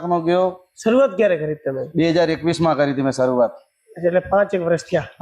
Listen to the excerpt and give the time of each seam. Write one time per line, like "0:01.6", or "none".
none